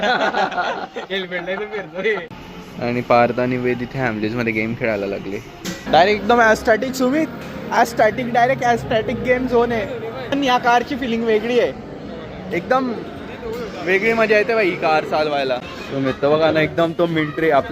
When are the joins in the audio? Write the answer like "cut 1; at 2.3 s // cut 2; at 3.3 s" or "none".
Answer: cut 1; at 2.4 s // cut 2; at 5.8 s // cut 3; at 10.3 s // cut 4; at 15.7 s